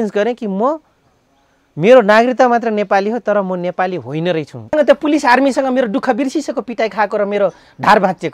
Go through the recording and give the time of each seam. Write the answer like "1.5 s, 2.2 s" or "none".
4.7 s